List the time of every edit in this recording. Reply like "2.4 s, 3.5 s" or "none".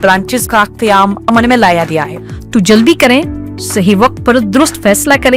2.1 s